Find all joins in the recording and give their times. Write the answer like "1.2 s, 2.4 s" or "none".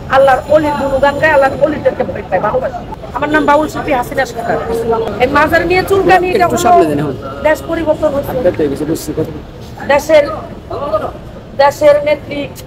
none